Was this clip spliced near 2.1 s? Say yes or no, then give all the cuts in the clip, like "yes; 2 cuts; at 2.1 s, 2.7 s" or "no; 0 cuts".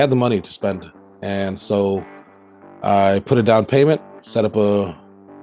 no; 0 cuts